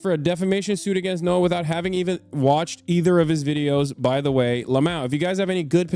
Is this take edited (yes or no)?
no